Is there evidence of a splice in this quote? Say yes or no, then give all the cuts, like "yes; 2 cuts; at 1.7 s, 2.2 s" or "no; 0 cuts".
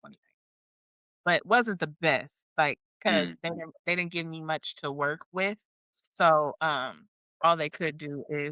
no; 0 cuts